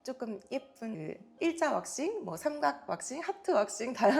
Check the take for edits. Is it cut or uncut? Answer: cut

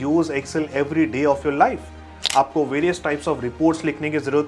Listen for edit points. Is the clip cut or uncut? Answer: cut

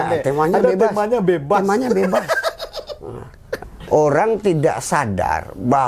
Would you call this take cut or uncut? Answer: cut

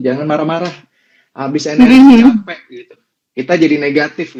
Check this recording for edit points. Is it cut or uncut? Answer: uncut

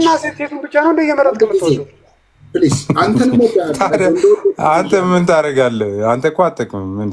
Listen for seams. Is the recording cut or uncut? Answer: uncut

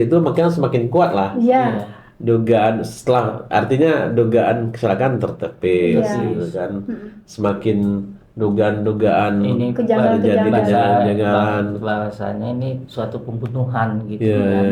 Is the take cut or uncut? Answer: uncut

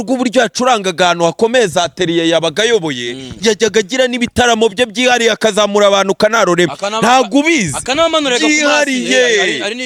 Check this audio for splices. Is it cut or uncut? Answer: uncut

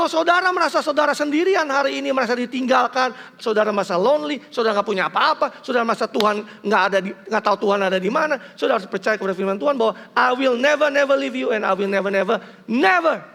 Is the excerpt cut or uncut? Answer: uncut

